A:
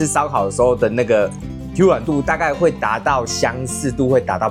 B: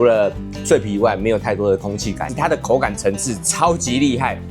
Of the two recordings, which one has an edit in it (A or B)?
B